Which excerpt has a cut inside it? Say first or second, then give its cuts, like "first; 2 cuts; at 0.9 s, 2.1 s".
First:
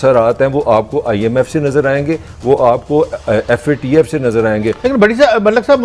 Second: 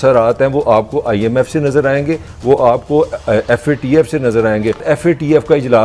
second; 1 cut; at 4.8 s